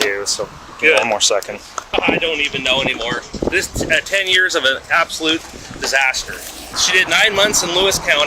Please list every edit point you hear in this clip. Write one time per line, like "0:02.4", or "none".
0:01.8
0:06.7